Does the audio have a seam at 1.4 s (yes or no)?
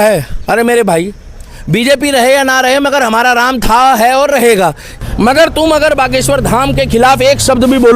no